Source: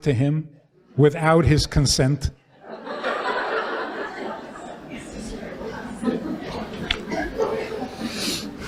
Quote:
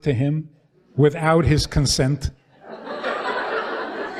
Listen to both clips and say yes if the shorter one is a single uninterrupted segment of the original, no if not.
yes